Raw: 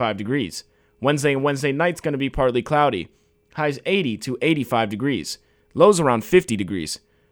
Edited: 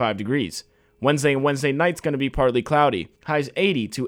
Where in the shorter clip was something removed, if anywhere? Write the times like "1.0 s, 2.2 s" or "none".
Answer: 3.1 s

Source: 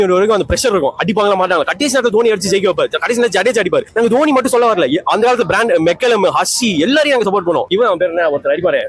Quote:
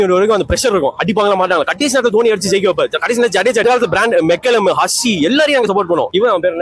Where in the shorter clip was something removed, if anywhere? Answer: 3.6 s

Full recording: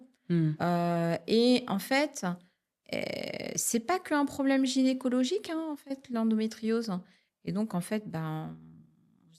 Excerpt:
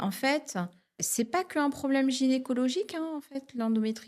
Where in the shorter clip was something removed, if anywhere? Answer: 0.9 s

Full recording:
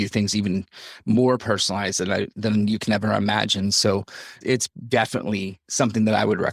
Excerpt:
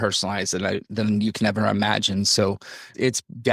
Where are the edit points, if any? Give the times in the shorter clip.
none

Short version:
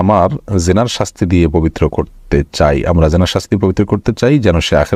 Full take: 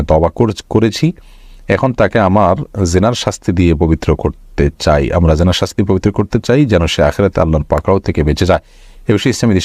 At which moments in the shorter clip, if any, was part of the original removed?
none

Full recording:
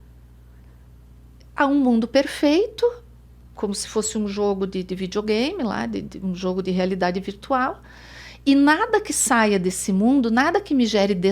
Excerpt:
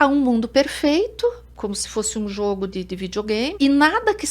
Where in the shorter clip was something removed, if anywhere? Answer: 1.5 s, 3.5 s

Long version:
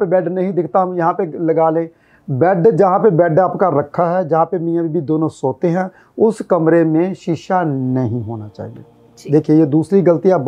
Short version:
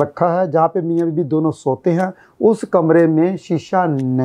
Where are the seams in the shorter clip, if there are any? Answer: none

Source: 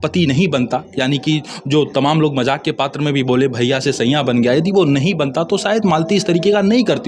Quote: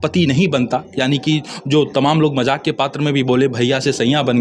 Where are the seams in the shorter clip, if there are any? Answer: none

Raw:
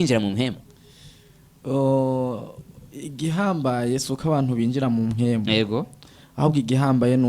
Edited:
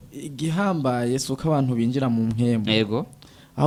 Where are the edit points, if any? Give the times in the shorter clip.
none

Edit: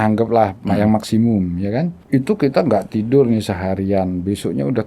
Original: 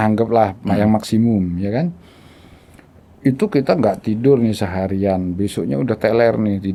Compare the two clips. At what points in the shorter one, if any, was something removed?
2.0 s

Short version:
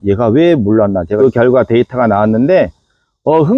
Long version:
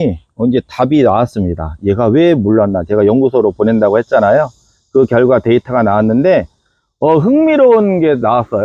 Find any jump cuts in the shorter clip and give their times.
1.1 s

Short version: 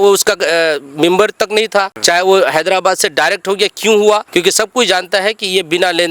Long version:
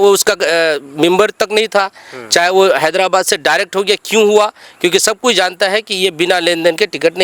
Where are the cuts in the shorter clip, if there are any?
1.9 s, 4.3 s

